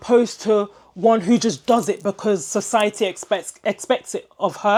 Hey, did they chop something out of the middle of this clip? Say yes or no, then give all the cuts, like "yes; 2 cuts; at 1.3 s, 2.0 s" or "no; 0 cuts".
no; 0 cuts